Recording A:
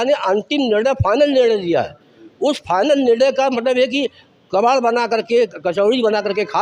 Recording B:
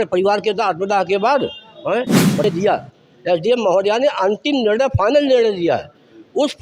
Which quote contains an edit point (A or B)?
B